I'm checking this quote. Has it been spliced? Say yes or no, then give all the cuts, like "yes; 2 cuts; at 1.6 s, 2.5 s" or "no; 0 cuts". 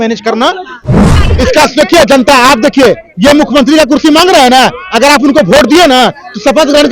yes; 1 cut; at 1.2 s